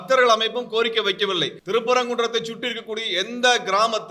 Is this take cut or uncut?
cut